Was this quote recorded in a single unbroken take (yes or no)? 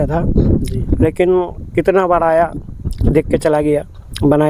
yes